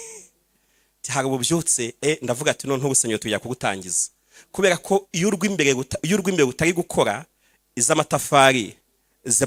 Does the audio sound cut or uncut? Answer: uncut